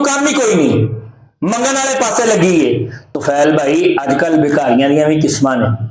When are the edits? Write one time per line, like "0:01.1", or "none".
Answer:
0:03.1